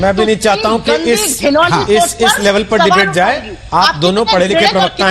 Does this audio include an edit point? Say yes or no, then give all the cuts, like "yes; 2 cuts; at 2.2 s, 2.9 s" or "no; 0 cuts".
no; 0 cuts